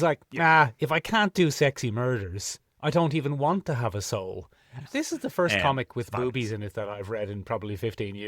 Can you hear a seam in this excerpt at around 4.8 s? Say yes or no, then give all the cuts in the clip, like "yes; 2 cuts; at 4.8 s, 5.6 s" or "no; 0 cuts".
yes; 1 cut; at 4.8 s